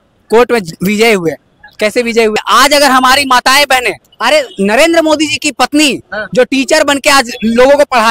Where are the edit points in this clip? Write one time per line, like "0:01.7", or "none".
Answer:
0:02.4